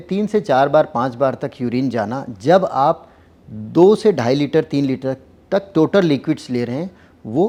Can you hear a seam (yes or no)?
no